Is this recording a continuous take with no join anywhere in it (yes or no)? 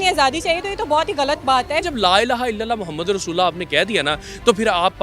no